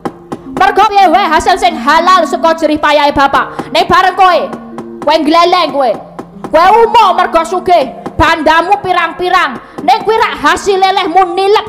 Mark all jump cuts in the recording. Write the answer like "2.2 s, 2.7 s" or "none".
0.9 s